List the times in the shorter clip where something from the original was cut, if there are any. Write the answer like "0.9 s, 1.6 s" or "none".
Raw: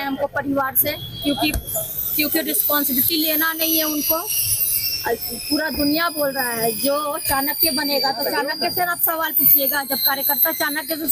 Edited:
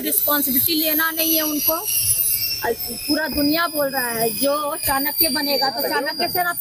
none